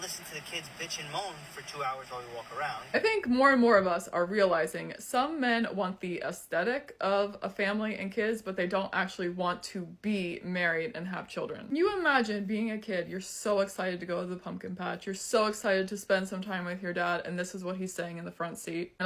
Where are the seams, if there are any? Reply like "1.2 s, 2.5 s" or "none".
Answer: 3.7 s, 12.8 s